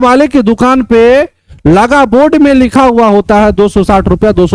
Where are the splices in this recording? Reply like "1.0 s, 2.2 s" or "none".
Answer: none